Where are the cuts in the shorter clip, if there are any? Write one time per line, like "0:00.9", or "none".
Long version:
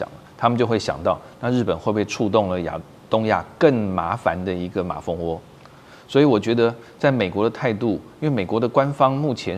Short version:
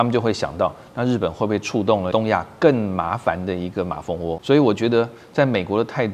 0:02.1
0:04.4